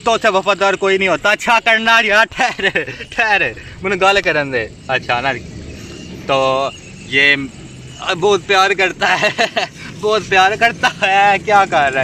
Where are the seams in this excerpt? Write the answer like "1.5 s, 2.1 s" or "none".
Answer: none